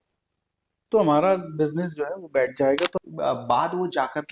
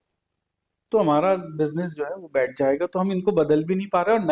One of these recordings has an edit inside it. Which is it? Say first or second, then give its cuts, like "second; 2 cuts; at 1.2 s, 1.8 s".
first; 1 cut; at 2.9 s